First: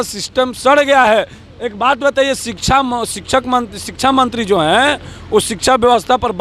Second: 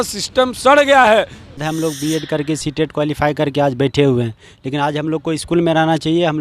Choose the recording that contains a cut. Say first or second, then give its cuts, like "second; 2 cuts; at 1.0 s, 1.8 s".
second; 1 cut; at 1.6 s